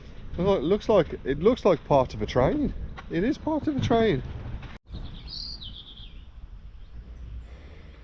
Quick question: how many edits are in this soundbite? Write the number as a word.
one